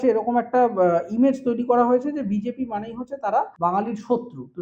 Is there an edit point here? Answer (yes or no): yes